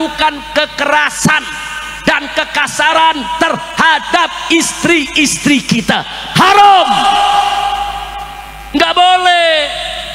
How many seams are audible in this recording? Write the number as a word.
zero